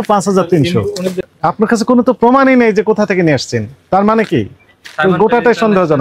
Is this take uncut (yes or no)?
no